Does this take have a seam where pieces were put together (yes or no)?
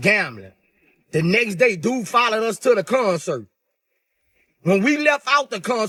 no